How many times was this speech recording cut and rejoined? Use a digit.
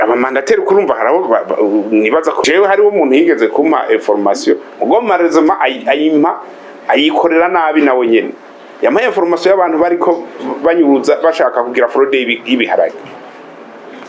1